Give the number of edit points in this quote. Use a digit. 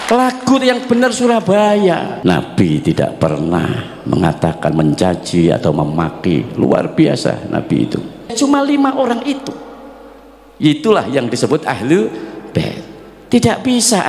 2